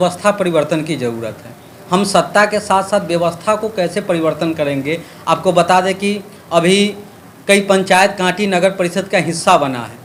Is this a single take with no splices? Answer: yes; 0 cuts

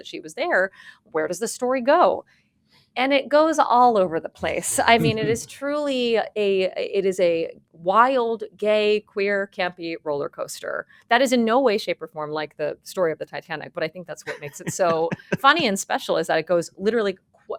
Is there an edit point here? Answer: no; 0 cuts

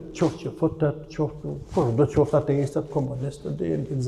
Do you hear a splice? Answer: no; 0 cuts

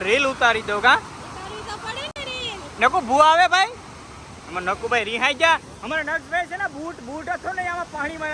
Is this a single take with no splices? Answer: yes; 0 cuts

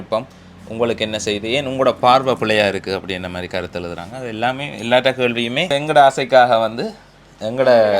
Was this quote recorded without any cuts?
no; 1 cut; at 5.7 s

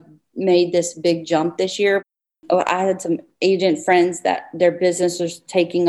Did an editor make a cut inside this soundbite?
yes; 1 cut; at 2.1 s

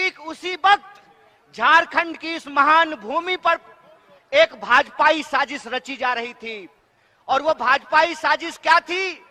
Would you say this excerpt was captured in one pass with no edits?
yes; 0 cuts

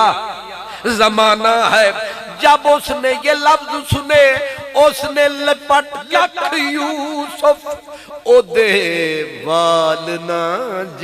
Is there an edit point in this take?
yes; 1 cut; at 6.0 s

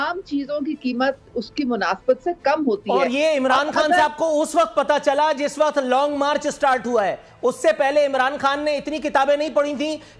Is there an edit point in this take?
no; 0 cuts

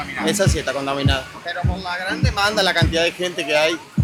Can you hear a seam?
no; 0 cuts

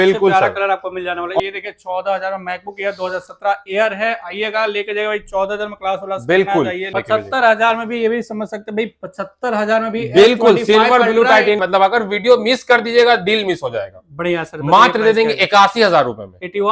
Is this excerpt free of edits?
no; 3 cuts; at 1.4 s, 6.9 s, 11.6 s

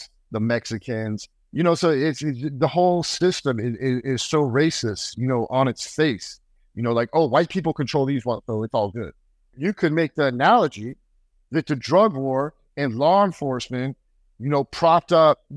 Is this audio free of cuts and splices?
no; 1 cut; at 9.6 s

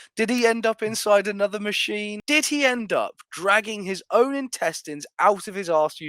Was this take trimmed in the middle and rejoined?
yes; 1 cut; at 2.1 s

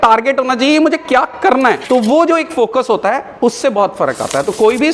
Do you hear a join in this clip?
yes; 1 cut; at 1.8 s

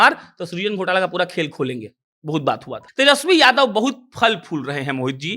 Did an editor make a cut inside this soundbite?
yes; 1 cut; at 2.8 s

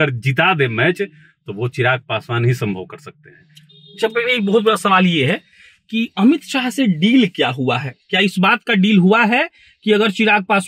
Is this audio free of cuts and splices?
yes; 0 cuts

